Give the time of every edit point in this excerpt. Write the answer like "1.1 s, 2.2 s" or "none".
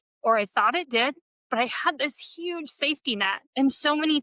1.3 s, 3.4 s